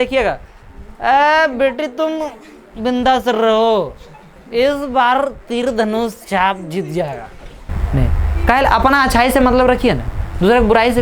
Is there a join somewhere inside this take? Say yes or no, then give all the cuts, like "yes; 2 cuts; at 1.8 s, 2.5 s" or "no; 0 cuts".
yes; 1 cut; at 7.7 s